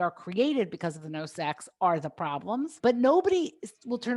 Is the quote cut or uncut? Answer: cut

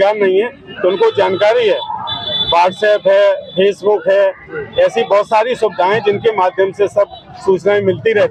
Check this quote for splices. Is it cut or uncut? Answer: uncut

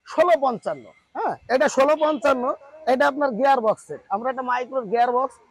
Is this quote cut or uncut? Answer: uncut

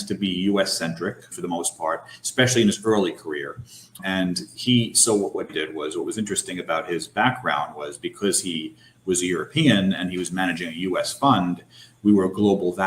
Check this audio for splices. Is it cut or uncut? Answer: cut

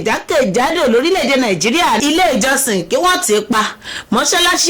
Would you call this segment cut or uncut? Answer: cut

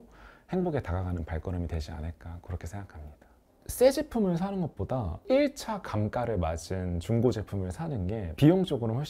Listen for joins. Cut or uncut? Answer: cut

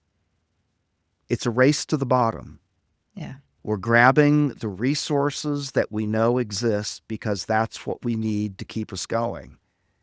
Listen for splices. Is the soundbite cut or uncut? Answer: uncut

